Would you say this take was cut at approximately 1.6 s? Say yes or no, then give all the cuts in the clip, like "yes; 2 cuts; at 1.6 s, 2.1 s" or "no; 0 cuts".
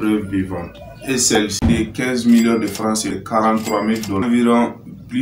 yes; 2 cuts; at 1.6 s, 3.2 s